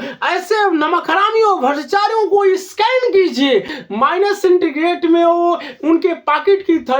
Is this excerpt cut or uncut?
cut